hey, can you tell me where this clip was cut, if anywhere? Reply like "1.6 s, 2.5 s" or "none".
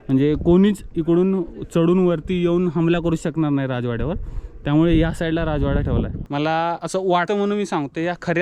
6.2 s, 7.1 s